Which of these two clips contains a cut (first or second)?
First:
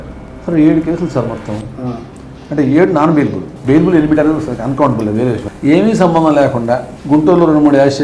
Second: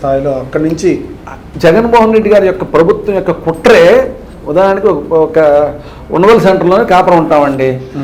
first